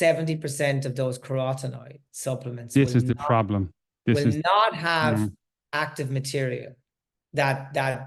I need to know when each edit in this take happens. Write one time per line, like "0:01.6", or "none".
none